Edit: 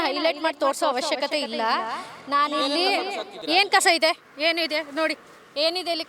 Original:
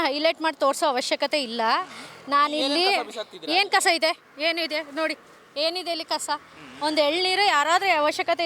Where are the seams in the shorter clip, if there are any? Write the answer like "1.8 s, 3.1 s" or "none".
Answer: none